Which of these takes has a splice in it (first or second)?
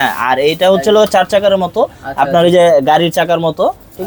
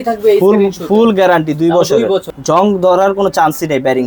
second